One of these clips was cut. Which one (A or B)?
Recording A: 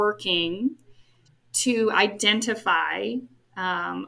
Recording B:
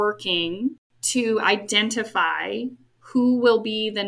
B